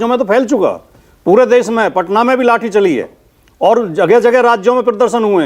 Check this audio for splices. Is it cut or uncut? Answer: cut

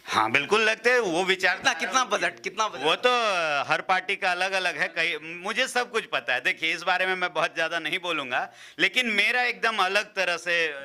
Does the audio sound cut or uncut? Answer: uncut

